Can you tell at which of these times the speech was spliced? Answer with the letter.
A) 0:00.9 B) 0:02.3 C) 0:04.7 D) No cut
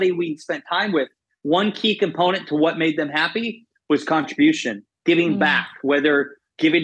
A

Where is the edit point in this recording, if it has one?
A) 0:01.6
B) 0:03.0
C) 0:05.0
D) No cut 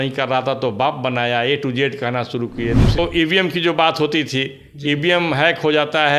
B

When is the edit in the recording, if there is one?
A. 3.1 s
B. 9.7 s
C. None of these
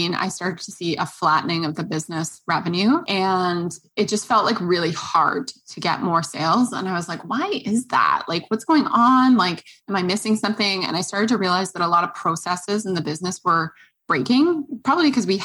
A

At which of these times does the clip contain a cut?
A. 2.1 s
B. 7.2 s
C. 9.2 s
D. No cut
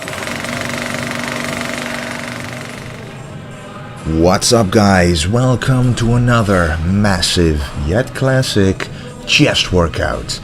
C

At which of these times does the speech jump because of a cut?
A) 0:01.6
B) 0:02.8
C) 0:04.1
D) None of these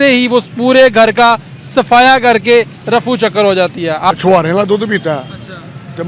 C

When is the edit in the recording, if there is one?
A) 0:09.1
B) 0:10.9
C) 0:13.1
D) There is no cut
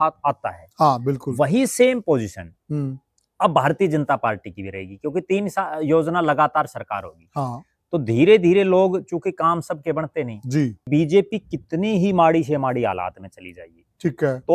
B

